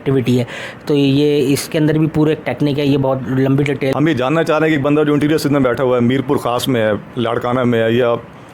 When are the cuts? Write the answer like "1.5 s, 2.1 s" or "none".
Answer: 3.9 s